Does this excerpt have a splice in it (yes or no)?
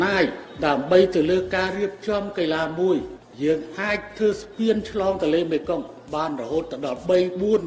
yes